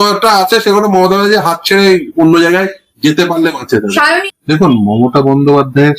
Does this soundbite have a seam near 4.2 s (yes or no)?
yes